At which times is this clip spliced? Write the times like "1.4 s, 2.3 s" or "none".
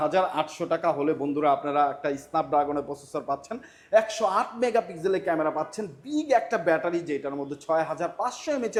none